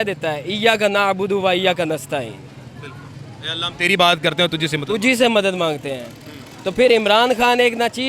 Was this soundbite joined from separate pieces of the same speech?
no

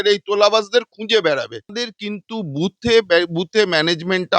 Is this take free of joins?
no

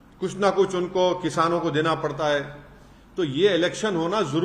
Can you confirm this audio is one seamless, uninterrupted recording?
yes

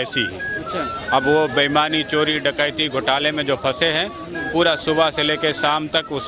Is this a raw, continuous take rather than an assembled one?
yes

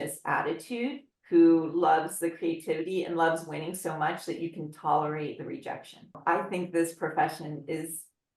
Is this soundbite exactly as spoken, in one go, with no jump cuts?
no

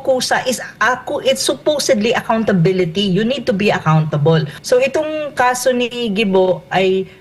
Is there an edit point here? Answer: yes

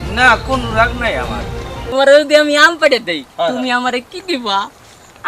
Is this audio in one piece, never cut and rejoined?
no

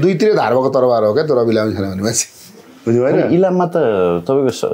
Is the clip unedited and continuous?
yes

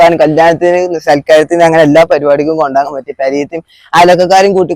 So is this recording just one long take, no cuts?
yes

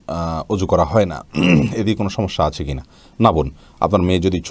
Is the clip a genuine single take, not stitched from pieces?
yes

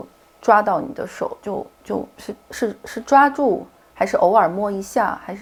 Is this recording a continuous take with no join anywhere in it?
yes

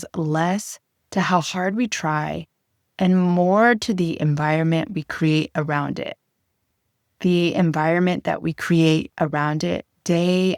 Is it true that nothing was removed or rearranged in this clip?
yes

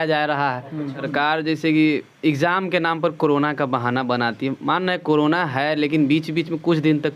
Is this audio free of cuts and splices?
no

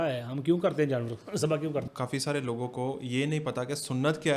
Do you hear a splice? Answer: yes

